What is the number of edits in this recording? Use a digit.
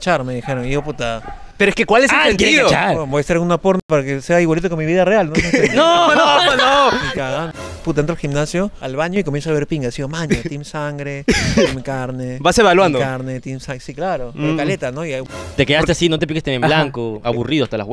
2